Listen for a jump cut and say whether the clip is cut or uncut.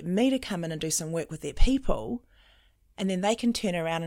uncut